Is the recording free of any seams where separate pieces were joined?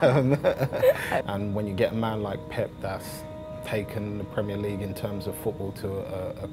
no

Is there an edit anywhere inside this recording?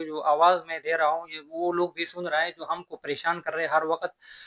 no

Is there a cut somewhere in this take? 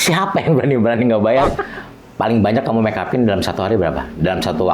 yes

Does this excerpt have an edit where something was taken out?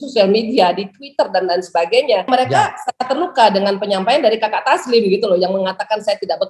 yes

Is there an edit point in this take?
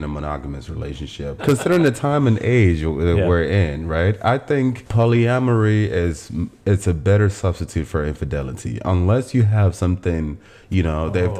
yes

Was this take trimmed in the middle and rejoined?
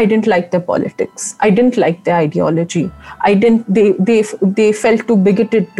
no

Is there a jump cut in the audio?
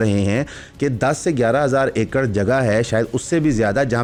no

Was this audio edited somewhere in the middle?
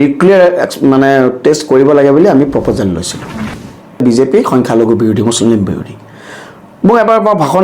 yes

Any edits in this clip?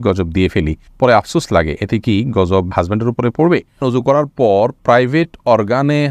yes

